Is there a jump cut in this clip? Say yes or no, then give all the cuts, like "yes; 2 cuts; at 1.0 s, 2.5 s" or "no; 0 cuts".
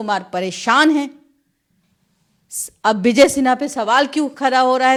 no; 0 cuts